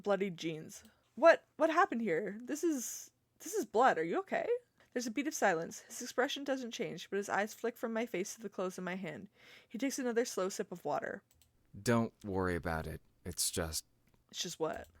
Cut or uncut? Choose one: cut